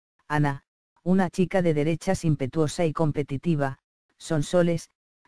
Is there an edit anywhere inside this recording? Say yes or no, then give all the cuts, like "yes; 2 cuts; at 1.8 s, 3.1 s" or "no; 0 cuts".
yes; 1 cut; at 4.2 s